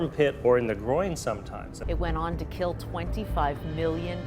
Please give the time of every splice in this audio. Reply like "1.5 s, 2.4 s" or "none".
1.7 s